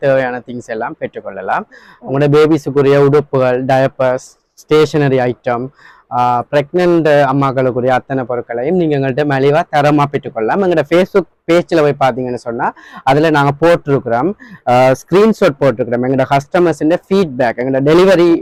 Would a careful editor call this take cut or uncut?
uncut